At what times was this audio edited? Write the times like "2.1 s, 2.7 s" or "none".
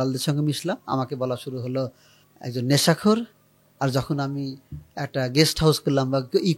none